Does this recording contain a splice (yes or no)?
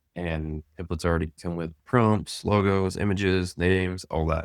yes